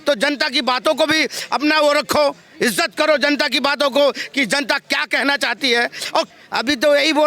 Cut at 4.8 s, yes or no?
no